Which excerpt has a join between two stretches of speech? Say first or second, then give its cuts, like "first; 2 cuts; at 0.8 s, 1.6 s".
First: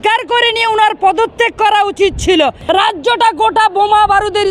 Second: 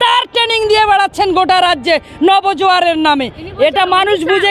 first; 1 cut; at 2.6 s